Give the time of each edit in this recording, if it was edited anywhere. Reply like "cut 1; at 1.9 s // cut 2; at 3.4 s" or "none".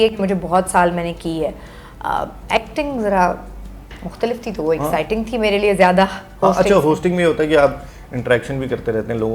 none